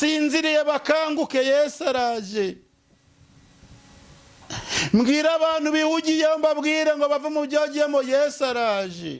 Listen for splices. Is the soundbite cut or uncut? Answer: uncut